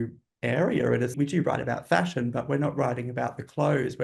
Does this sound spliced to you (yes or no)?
yes